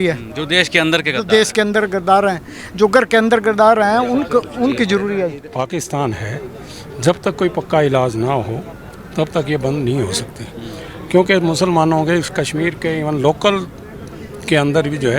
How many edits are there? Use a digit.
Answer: 1